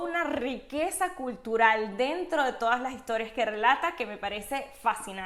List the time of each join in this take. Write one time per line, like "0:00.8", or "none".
none